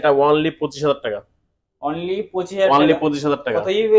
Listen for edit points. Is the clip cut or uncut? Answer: uncut